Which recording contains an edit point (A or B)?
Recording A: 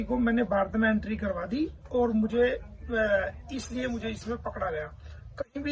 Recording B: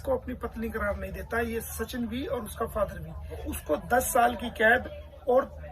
B